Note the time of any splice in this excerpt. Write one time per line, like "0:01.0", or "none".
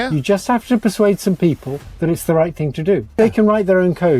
0:03.2